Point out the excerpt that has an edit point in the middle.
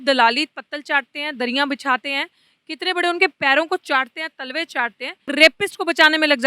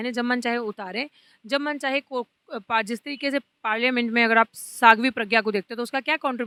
first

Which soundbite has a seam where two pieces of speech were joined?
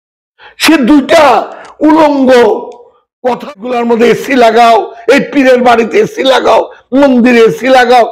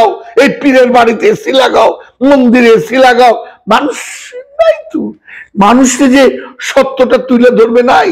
first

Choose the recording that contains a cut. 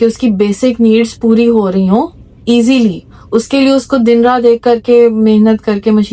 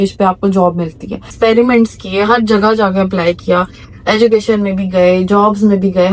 second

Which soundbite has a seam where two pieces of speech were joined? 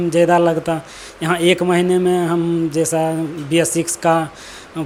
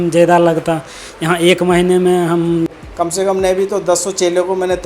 second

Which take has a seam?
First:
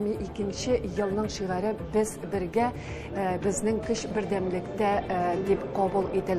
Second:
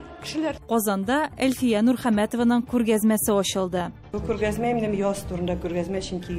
second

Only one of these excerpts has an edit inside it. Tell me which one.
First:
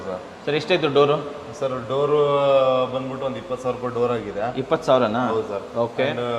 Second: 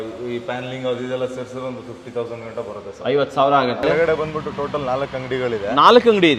second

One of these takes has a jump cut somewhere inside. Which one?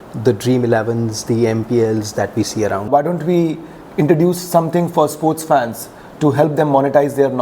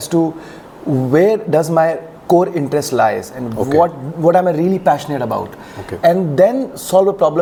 first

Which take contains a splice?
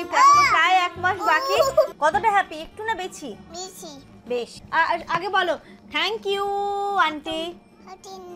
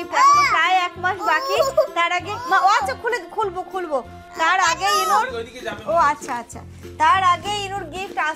first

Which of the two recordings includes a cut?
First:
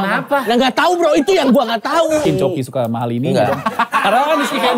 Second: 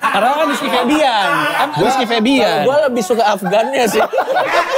first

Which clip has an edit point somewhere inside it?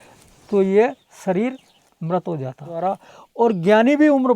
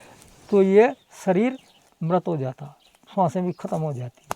first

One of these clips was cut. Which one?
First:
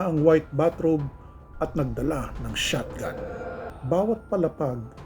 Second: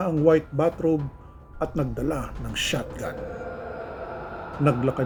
first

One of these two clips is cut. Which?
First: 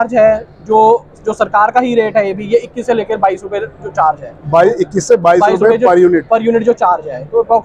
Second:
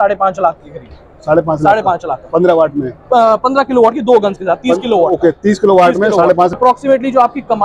second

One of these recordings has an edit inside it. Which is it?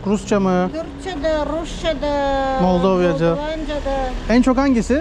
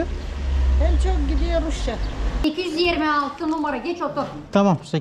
second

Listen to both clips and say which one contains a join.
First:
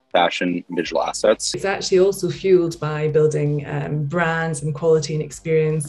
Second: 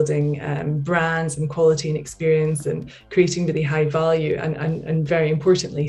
first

